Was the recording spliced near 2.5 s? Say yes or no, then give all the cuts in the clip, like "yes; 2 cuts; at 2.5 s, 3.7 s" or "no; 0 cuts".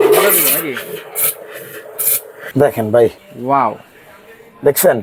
yes; 2 cuts; at 2.5 s, 3.3 s